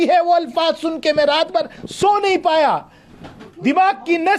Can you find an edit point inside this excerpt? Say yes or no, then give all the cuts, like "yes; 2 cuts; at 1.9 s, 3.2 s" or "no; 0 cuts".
no; 0 cuts